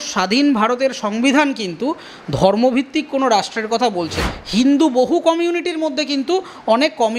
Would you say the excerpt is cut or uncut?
cut